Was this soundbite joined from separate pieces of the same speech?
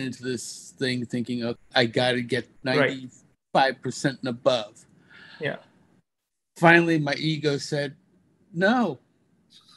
yes; 2 cuts; at 1.6 s, 2.5 s

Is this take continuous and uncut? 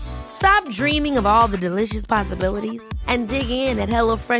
yes; 0 cuts

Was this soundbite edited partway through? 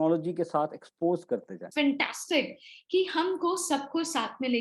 yes; 1 cut; at 1.7 s

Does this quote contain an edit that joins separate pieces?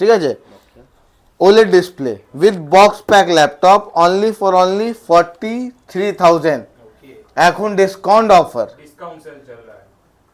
no; 0 cuts

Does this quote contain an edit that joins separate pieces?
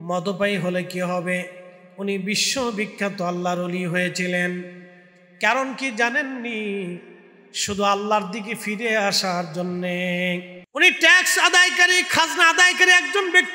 yes; 1 cut; at 10.6 s

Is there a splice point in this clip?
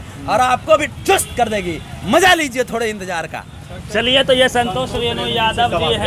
no; 0 cuts

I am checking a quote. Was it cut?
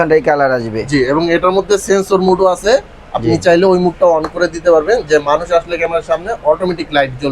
no; 0 cuts

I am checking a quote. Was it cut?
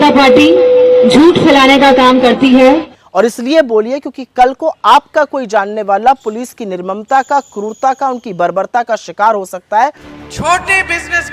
yes; 2 cuts; at 3.0 s, 10.1 s

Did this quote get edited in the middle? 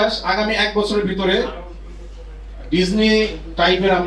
no; 0 cuts

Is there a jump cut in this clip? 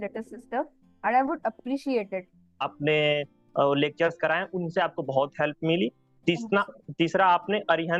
yes; 1 cut; at 2.5 s

